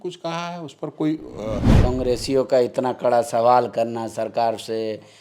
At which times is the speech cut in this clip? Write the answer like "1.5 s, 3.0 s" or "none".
1.7 s